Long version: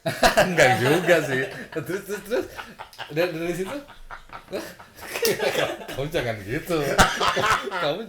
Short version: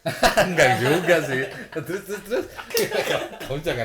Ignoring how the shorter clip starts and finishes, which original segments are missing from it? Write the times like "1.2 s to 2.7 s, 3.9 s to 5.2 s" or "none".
2.6 s to 5.1 s